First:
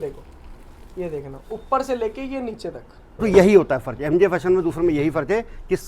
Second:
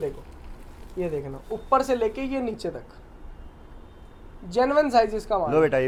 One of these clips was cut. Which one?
first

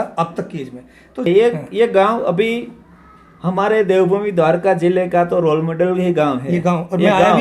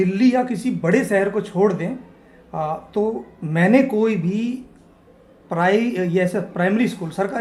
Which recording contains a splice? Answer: first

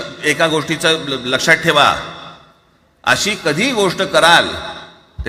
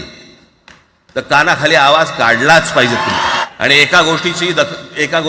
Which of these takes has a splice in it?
second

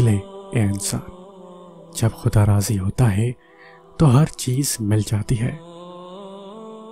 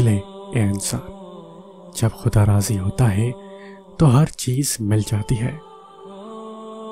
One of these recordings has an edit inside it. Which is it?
second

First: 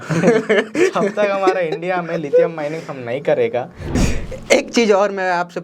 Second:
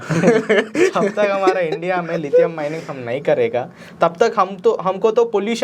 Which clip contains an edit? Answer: first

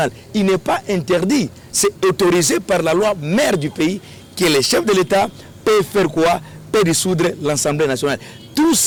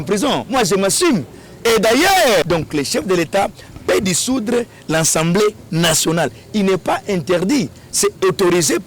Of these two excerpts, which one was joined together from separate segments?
second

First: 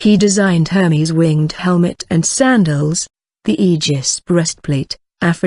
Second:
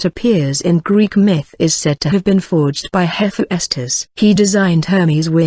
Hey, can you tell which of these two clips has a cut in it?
second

